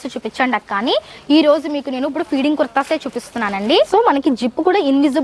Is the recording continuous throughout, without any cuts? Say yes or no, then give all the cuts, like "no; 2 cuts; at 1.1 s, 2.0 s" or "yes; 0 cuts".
no; 1 cut; at 3.9 s